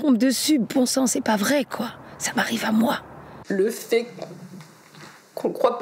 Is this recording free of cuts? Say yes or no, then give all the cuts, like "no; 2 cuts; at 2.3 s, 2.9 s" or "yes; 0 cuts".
no; 1 cut; at 3.3 s